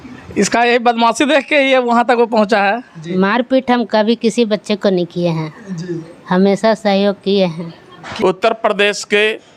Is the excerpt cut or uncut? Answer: cut